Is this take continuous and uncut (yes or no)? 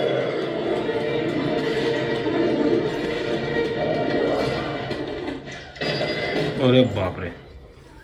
yes